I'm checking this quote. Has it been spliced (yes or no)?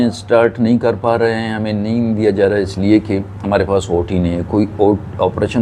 no